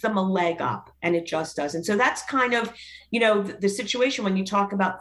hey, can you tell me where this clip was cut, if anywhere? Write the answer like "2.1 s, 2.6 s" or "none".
none